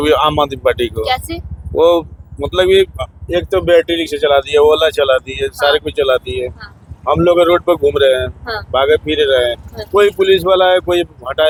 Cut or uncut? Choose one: uncut